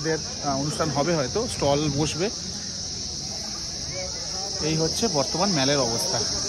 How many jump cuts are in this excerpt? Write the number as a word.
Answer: zero